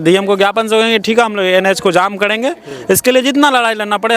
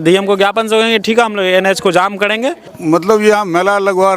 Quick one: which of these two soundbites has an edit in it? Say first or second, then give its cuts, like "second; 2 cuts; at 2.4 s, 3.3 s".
second; 1 cut; at 2.7 s